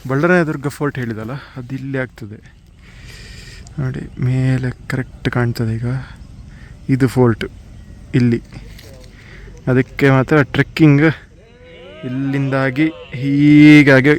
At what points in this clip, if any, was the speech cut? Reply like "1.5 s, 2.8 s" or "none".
none